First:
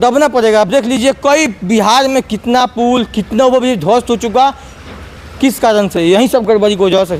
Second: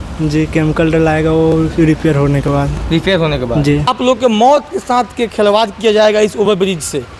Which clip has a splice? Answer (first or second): second